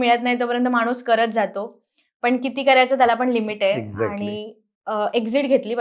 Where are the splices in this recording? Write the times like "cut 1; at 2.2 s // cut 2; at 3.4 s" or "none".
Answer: none